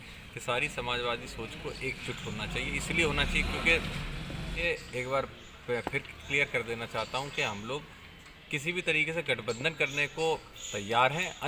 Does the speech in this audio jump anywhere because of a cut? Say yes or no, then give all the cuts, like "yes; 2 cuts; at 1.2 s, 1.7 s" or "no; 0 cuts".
yes; 1 cut; at 4.6 s